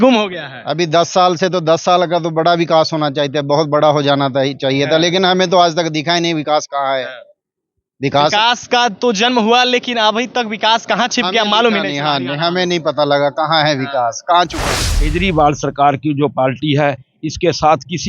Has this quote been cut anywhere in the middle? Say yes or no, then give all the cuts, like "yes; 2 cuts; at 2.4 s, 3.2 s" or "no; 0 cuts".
yes; 1 cut; at 14.7 s